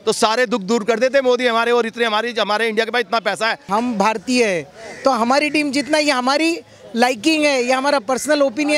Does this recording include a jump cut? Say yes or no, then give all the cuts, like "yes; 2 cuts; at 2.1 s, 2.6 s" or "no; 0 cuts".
yes; 1 cut; at 3.7 s